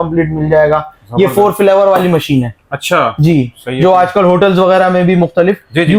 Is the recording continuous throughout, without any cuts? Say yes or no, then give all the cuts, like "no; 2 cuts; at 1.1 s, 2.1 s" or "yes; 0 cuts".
yes; 0 cuts